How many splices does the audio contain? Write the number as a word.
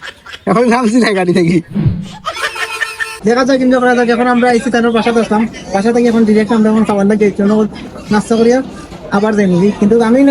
one